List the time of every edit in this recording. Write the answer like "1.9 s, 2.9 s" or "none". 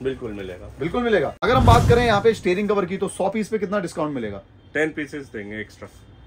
1.4 s